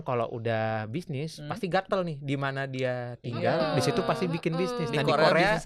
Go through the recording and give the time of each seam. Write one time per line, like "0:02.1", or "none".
none